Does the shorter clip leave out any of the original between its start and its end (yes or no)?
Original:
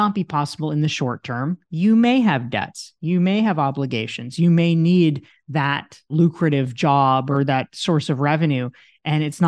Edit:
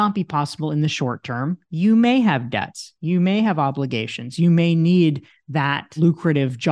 yes